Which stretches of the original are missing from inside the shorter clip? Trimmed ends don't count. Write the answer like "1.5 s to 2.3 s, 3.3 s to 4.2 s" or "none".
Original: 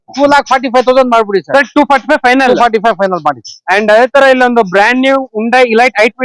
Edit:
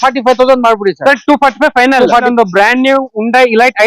2.7 s to 4.4 s